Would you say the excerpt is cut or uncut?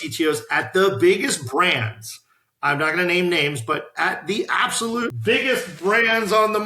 cut